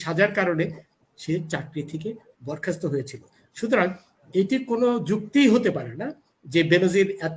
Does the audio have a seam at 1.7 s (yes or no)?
no